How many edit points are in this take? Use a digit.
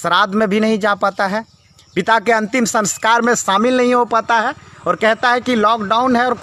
0